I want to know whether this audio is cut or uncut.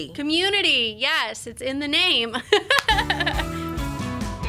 cut